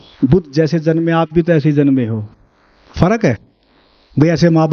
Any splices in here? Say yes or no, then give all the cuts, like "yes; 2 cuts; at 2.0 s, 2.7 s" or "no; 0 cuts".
no; 0 cuts